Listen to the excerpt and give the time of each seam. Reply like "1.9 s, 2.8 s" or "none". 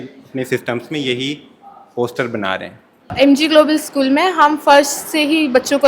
3.2 s